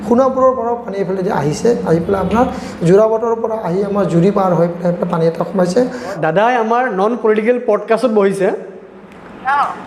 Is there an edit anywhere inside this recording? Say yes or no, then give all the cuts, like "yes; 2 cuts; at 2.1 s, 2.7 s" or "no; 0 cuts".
yes; 1 cut; at 6.2 s